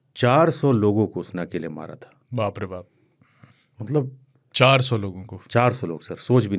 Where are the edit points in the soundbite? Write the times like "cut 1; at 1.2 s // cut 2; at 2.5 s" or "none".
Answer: none